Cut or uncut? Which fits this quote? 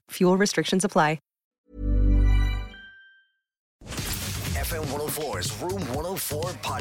cut